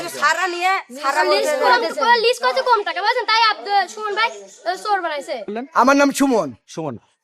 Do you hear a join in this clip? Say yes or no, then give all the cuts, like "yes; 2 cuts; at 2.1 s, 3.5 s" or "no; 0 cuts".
yes; 1 cut; at 5.5 s